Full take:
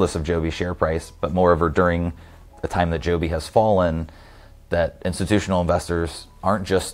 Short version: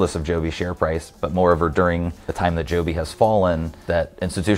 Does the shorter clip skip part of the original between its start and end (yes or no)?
yes